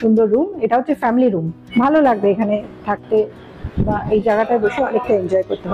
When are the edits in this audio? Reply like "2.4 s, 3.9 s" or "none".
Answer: 1.5 s